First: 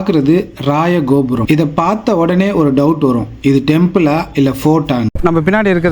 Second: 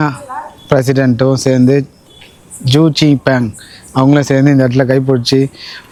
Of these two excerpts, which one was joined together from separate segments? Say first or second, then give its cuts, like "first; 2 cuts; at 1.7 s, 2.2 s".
first; 2 cuts; at 1.5 s, 5.1 s